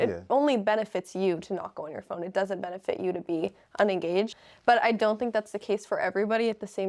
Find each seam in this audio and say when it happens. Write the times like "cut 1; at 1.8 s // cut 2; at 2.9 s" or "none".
cut 1; at 4.3 s

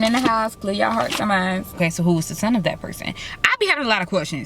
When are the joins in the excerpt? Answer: cut 1; at 1.8 s

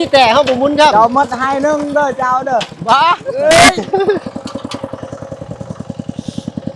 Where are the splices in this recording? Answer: cut 1; at 3.3 s

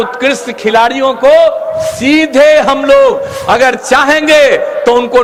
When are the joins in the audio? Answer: none

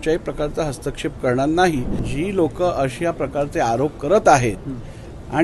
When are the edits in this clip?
cut 1; at 2.1 s

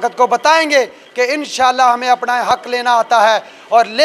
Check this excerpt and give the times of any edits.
none

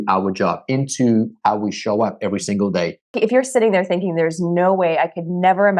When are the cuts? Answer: cut 1; at 3.1 s

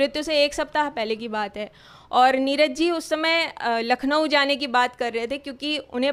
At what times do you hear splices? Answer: none

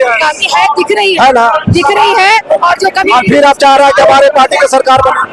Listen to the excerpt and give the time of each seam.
none

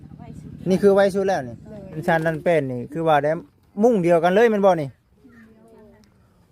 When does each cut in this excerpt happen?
cut 1; at 2.0 s

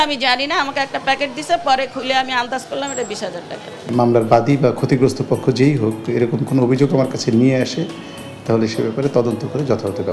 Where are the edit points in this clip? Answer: cut 1; at 3.8 s

